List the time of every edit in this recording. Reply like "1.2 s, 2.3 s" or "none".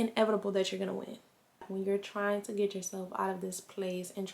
1.6 s